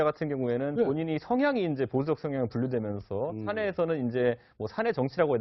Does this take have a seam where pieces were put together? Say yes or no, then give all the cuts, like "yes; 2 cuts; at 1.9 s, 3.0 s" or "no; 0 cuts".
no; 0 cuts